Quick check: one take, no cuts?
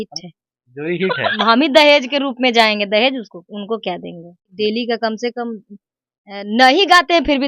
no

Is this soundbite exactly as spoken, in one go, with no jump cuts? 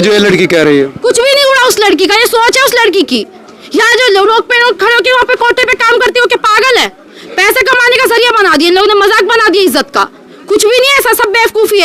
yes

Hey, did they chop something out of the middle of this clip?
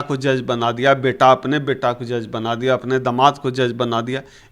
no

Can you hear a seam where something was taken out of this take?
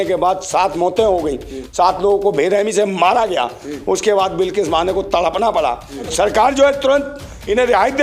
yes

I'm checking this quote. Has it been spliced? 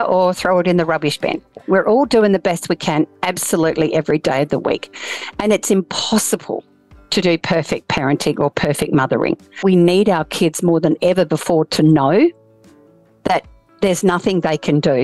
yes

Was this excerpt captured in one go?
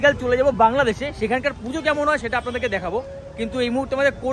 yes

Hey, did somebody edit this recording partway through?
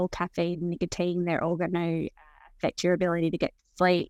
no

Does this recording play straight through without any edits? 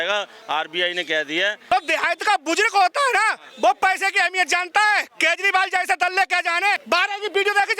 no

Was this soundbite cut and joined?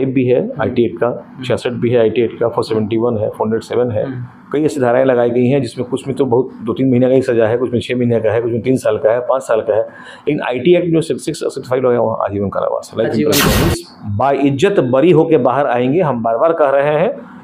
yes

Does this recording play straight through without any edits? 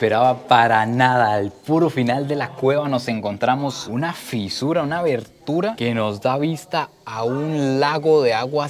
yes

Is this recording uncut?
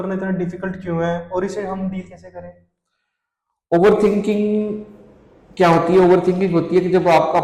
yes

